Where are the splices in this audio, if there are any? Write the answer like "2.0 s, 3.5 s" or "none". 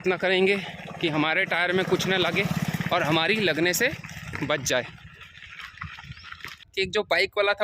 6.6 s